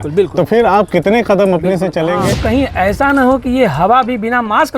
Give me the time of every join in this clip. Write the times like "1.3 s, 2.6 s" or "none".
2.3 s